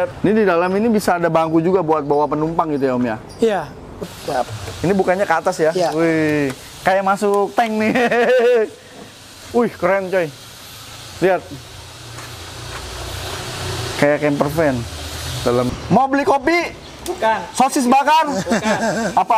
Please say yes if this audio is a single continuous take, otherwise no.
no